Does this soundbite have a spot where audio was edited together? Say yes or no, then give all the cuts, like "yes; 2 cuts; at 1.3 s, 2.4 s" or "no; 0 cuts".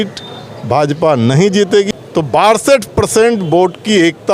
yes; 1 cut; at 1.9 s